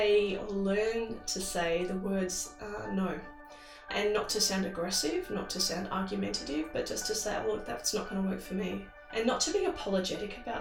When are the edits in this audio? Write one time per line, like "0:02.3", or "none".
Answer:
0:08.9